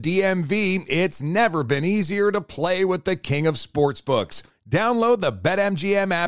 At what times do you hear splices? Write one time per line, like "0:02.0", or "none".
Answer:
none